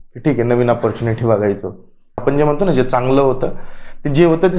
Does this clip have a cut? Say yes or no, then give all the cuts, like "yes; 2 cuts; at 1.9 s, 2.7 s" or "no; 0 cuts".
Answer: yes; 1 cut; at 2.2 s